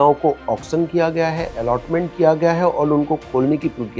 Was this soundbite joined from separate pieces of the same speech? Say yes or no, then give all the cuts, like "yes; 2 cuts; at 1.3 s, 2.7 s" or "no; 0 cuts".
no; 0 cuts